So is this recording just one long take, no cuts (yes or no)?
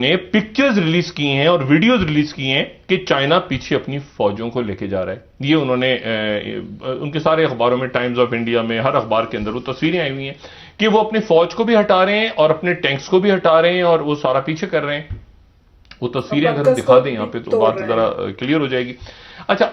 yes